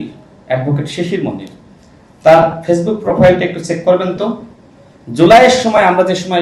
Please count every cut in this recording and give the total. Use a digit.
0